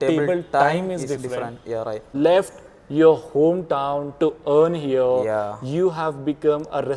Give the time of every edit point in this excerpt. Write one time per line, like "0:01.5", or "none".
0:02.1